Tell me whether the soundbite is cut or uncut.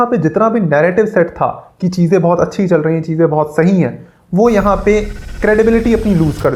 uncut